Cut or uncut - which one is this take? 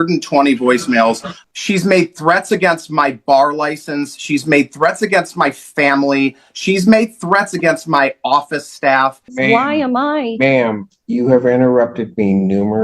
cut